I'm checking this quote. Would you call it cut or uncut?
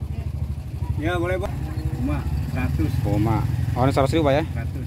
uncut